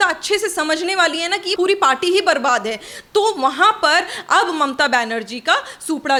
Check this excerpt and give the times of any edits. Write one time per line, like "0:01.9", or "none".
none